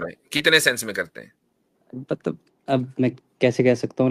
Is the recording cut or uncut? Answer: uncut